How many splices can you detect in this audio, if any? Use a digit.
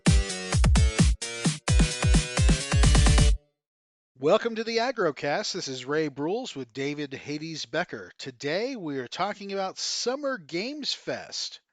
1